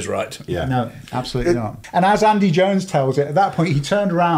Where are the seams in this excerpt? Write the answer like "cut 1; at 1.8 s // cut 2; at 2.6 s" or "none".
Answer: cut 1; at 1.7 s